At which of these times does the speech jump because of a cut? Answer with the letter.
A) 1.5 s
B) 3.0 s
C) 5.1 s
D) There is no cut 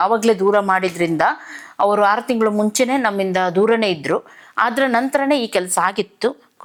D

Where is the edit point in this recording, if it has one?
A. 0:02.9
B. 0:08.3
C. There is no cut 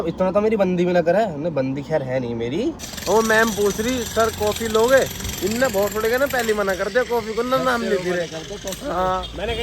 A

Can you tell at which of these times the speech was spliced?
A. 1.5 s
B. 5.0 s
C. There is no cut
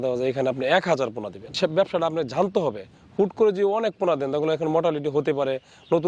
A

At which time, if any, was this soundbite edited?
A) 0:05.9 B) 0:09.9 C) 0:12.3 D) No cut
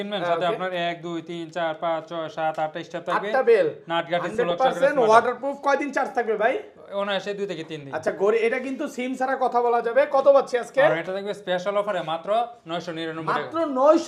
D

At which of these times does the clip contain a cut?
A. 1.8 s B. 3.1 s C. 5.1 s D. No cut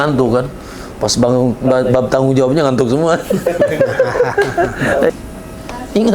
C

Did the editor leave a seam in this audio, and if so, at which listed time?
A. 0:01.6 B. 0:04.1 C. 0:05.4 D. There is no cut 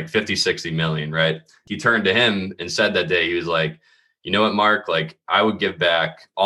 A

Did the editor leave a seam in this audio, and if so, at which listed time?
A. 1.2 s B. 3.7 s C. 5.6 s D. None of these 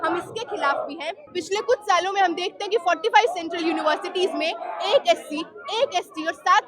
A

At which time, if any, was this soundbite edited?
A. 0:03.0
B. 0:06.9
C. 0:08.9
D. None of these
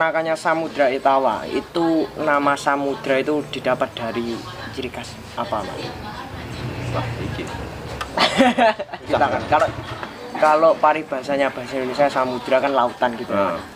C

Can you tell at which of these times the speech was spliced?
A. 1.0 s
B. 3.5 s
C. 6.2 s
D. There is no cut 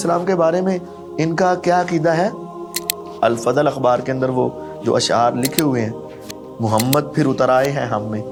D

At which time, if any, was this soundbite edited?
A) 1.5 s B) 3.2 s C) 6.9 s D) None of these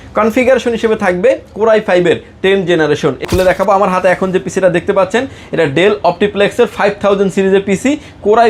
B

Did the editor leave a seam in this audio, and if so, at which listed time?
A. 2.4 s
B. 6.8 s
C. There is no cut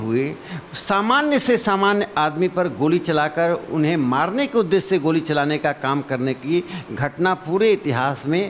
C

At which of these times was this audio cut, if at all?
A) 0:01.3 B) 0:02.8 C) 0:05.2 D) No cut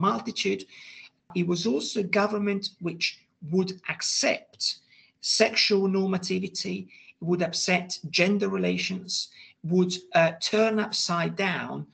A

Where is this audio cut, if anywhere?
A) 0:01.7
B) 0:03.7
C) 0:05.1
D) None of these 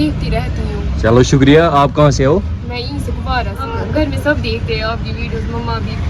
B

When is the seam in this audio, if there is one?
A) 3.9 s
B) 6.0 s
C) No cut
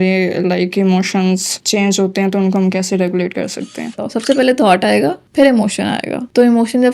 A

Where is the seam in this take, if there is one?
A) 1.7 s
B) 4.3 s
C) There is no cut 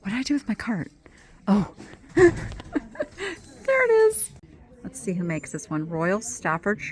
B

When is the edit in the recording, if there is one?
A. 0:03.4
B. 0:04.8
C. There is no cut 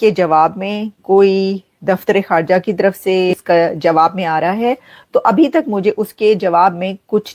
A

